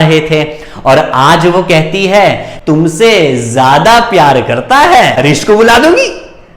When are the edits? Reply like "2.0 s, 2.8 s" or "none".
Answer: 5.2 s